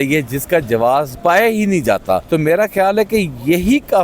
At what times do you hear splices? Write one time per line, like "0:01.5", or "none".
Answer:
0:01.1
0:02.2